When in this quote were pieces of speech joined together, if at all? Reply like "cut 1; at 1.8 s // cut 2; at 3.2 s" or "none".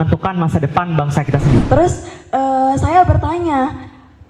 cut 1; at 1.6 s